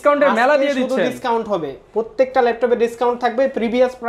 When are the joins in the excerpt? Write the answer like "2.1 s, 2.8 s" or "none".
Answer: none